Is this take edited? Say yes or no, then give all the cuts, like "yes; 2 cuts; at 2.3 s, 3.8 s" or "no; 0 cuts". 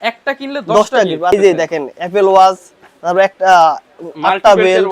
yes; 1 cut; at 1.3 s